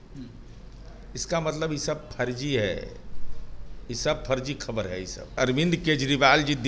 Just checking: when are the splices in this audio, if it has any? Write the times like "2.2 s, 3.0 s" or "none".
5.4 s